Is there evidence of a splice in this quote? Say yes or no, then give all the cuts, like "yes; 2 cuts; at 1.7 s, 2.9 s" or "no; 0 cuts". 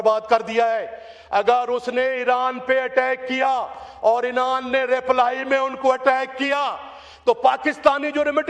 no; 0 cuts